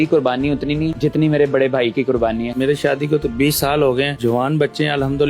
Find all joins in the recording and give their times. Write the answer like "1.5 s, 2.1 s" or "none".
0.9 s, 2.5 s, 4.1 s